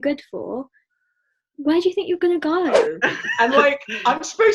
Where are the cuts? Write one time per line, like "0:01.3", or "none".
0:02.8